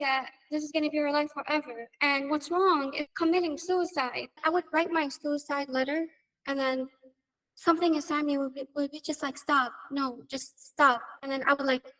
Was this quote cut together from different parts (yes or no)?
yes